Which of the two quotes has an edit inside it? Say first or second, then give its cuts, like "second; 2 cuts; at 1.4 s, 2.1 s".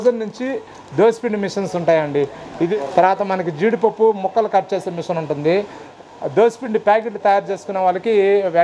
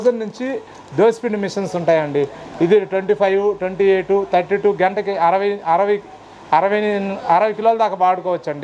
first; 2 cuts; at 2.7 s, 5.8 s